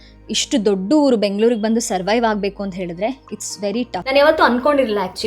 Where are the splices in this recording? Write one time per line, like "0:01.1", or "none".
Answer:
0:04.0